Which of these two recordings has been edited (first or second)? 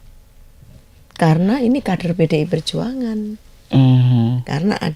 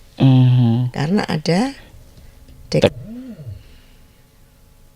second